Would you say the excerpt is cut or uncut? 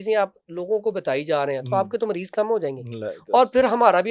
uncut